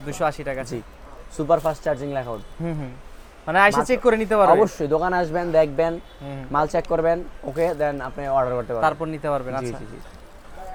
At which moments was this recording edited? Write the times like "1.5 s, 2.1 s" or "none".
none